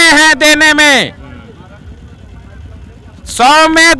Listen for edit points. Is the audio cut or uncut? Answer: uncut